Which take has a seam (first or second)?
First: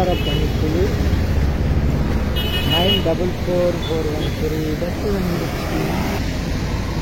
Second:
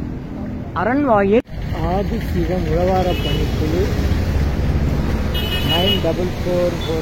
second